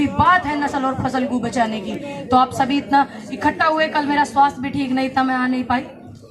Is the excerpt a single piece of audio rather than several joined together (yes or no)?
yes